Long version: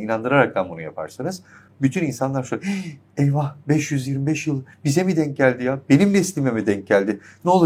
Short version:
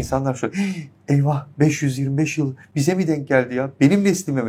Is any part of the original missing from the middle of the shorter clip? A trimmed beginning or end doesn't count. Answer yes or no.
no